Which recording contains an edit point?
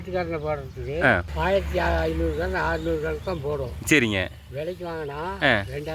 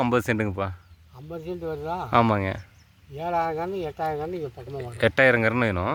first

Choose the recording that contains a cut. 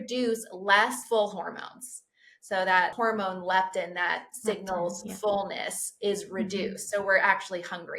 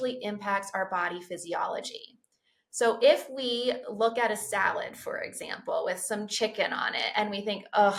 first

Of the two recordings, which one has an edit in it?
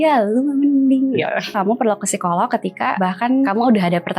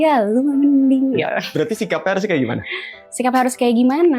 first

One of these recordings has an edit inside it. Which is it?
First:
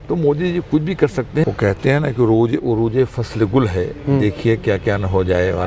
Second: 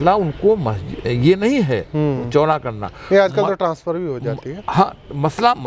first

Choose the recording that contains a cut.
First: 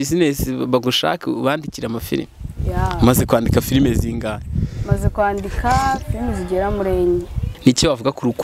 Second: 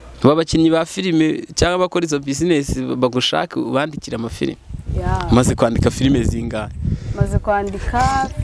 first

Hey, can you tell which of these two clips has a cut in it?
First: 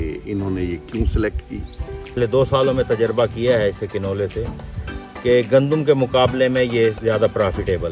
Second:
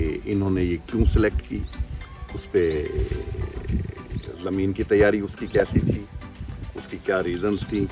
first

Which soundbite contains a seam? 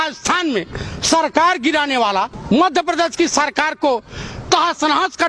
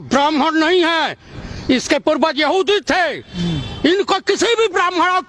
first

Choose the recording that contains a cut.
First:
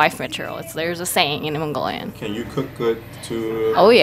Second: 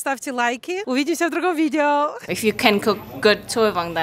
second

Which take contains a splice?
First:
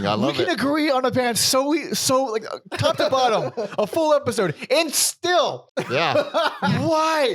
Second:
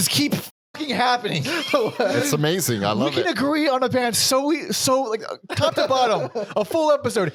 first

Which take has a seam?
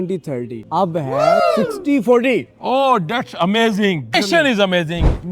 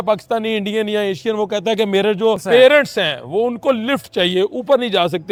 first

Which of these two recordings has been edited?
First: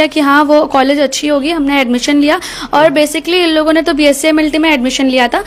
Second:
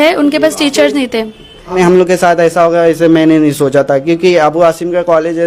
second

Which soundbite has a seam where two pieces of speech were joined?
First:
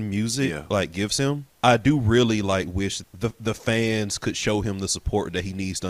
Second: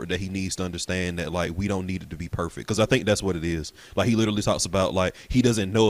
first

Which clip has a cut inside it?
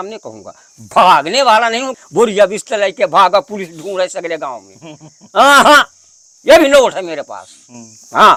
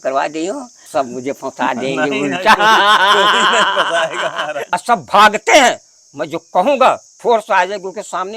second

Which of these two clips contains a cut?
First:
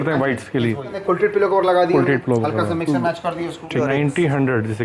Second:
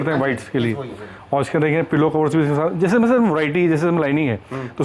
first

